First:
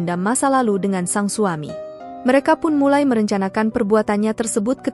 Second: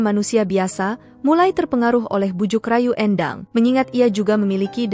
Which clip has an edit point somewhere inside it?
second; 1 cut; at 3.4 s

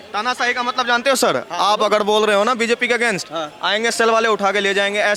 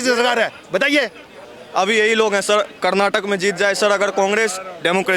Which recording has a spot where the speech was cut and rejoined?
second; 1 cut; at 1.4 s

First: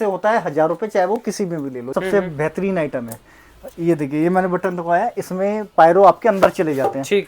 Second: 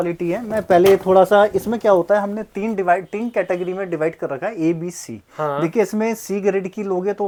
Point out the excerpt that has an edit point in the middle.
first; 1 cut; at 2.0 s

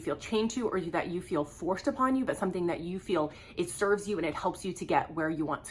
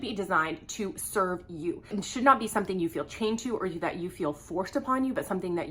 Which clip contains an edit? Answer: second; 1 cut; at 1.9 s

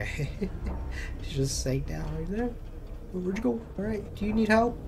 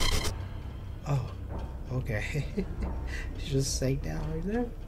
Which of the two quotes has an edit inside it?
first; 1 cut; at 3.8 s

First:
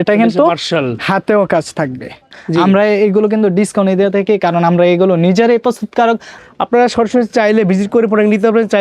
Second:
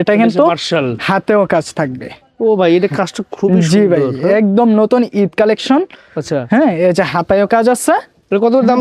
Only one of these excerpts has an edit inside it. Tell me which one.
first; 2 cuts; at 2.3 s, 6.3 s

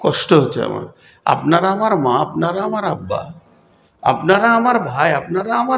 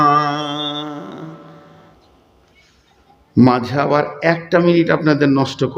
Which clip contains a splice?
second; 1 cut; at 1.9 s

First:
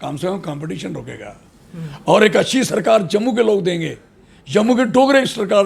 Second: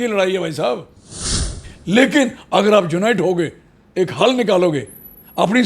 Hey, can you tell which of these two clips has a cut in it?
second; 1 cut; at 1.5 s

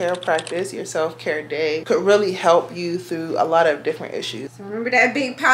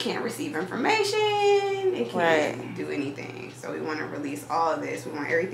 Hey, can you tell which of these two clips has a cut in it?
first; 2 cuts; at 1.8 s, 4.4 s

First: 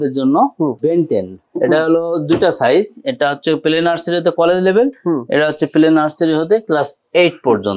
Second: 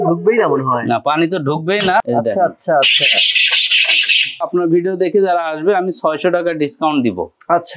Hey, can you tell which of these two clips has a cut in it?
second; 2 cuts; at 2.0 s, 4.5 s

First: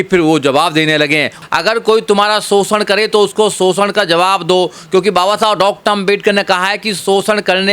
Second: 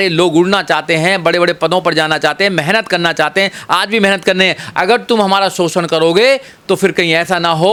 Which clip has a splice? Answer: first; 1 cut; at 1.4 s

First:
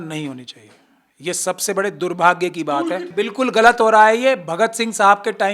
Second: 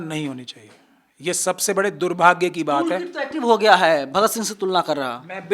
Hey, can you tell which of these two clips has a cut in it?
first; 1 cut; at 3.1 s

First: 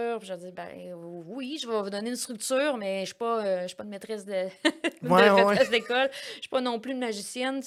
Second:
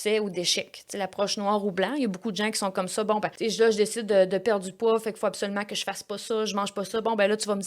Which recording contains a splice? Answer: second; 1 cut; at 3.3 s

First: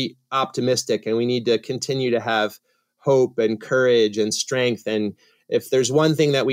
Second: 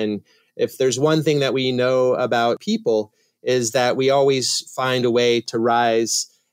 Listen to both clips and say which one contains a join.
second; 2 cuts; at 2.6 s, 5.5 s

